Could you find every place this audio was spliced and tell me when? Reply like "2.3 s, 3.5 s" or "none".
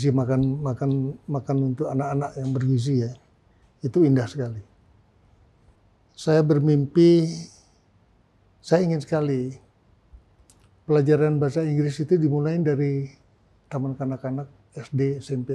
5.8 s